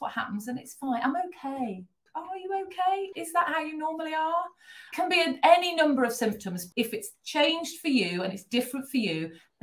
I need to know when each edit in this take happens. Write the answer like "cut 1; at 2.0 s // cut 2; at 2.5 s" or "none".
cut 1; at 2.0 s // cut 2; at 3.1 s // cut 3; at 4.9 s // cut 4; at 6.6 s